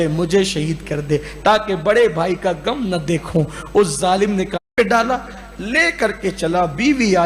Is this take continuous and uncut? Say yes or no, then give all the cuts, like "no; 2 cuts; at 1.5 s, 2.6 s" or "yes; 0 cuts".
no; 1 cut; at 4.7 s